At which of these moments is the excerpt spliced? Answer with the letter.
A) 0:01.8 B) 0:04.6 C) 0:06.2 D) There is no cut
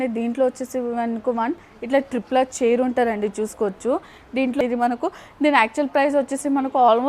B